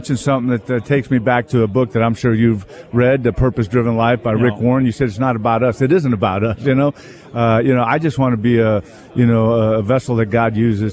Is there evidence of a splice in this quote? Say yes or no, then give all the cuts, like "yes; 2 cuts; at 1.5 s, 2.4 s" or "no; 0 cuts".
no; 0 cuts